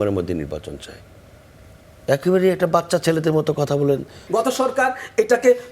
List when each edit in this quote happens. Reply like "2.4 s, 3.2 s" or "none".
4.2 s

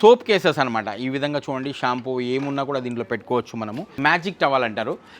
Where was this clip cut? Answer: 3.8 s

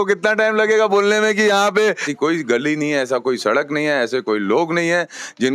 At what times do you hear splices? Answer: 2.1 s

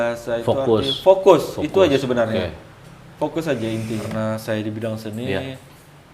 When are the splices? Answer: 4.1 s

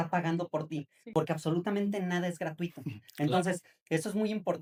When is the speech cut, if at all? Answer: none

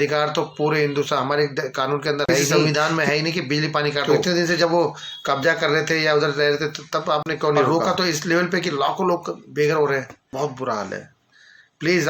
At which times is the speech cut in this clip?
2.5 s, 4.0 s, 7.7 s, 10.2 s

